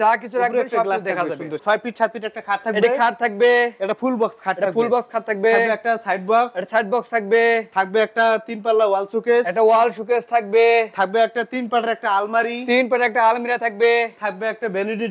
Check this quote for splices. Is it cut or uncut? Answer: cut